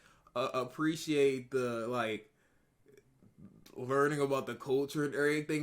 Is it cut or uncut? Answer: uncut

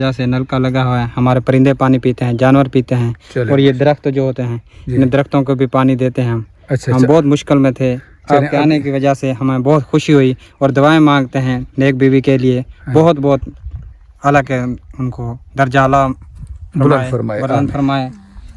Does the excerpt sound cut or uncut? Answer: uncut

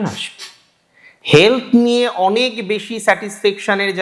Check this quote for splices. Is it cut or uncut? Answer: uncut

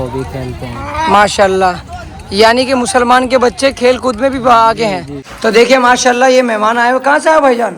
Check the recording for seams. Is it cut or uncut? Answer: cut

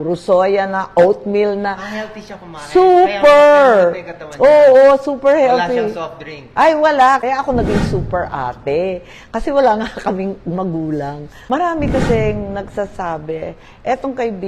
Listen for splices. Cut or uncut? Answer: cut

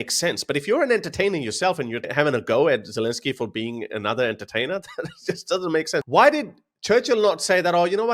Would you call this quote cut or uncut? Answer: cut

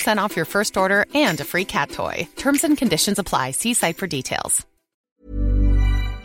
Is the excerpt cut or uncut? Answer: cut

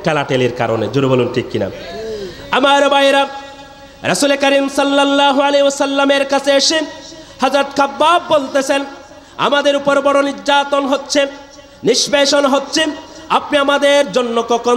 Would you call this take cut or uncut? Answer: uncut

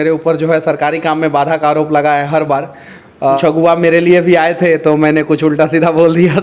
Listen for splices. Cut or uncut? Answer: cut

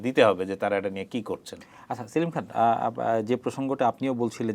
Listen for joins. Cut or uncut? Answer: uncut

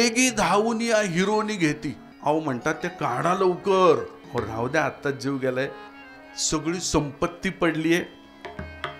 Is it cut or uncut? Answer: cut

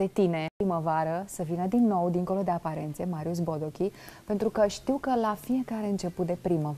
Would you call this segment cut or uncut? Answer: uncut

